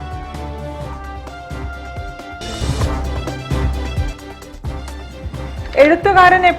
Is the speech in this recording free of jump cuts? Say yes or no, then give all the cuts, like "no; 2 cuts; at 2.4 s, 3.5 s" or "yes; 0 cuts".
no; 1 cut; at 4.9 s